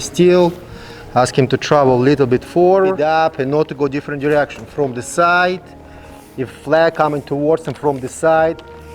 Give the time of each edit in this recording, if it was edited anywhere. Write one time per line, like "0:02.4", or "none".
0:03.0